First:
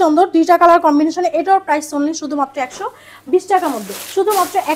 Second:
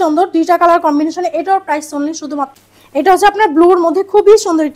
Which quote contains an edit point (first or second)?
second